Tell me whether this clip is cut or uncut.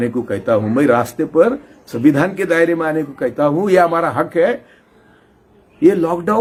uncut